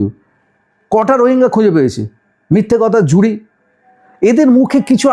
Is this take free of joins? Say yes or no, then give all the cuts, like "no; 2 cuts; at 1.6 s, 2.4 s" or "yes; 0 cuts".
yes; 0 cuts